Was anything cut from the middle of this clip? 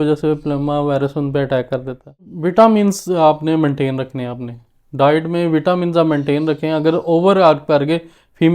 yes; 1 cut; at 2.3 s

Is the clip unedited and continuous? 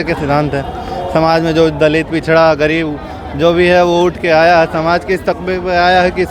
yes; 0 cuts

